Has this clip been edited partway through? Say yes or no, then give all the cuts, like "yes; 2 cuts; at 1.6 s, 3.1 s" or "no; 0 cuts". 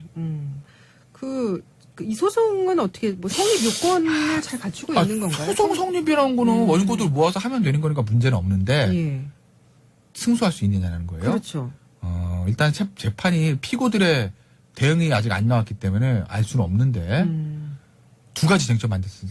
no; 0 cuts